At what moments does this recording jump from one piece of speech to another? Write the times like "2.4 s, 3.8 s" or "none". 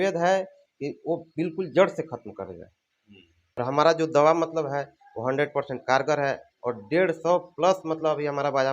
3.6 s